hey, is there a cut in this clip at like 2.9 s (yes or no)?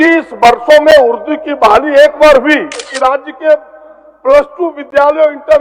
yes